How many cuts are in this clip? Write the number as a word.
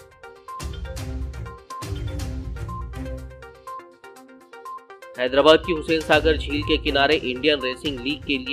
zero